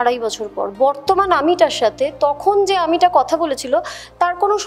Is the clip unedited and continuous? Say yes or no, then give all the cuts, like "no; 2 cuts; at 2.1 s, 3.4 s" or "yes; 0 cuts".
yes; 0 cuts